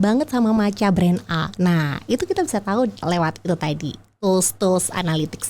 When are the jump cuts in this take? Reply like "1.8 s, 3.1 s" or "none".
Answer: 3.0 s